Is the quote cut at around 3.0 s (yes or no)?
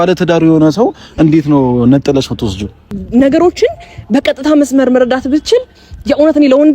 yes